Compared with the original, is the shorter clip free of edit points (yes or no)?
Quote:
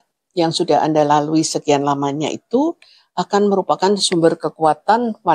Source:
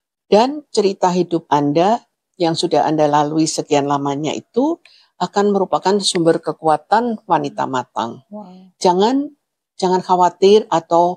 yes